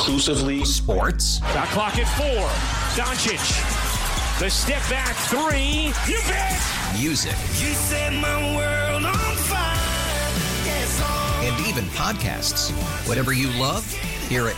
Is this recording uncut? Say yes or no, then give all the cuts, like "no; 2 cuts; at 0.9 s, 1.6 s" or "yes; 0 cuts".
yes; 0 cuts